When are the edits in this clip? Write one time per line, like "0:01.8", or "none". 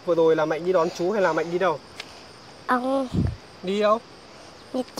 none